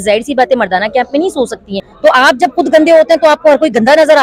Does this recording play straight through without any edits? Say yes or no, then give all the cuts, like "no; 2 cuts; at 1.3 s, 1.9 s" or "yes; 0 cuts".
no; 1 cut; at 1.9 s